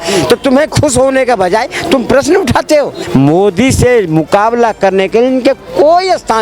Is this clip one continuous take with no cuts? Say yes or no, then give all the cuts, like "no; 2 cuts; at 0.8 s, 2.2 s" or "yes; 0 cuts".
no; 1 cut; at 3.0 s